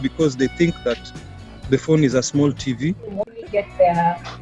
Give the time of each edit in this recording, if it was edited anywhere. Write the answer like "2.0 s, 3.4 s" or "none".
3.4 s